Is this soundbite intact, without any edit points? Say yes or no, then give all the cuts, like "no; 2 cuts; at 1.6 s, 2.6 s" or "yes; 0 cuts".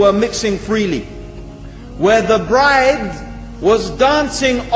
yes; 0 cuts